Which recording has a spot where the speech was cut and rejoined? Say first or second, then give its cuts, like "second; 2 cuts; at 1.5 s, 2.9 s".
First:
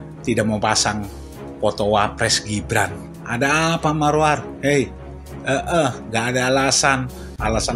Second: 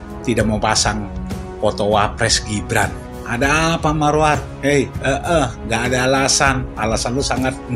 second; 2 cuts; at 4.9 s, 6.7 s